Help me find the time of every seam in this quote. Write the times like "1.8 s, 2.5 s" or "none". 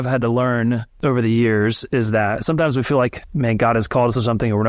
0.9 s, 3.2 s